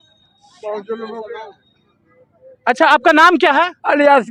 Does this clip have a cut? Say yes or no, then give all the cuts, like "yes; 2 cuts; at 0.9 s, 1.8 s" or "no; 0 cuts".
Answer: no; 0 cuts